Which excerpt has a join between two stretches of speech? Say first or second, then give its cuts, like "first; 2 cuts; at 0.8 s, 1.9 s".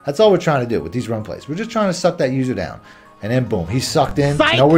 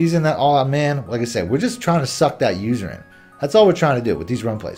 first; 1 cut; at 2.8 s